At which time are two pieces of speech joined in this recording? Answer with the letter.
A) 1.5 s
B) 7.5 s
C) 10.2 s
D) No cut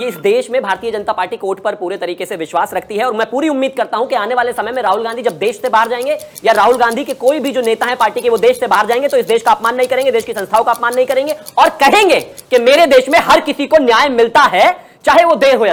D